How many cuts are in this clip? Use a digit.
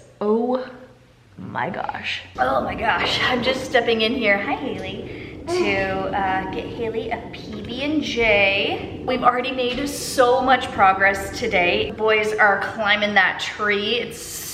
0